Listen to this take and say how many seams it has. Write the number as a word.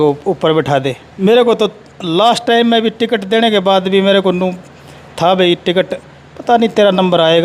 one